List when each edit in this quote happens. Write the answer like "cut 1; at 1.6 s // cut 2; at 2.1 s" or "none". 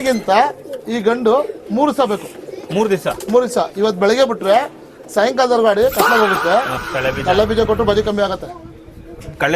cut 1; at 6.8 s